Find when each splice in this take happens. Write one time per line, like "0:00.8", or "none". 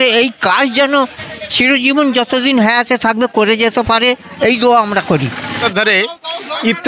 0:05.6